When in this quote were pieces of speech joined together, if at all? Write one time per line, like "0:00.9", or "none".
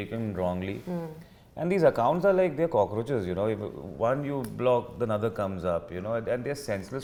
none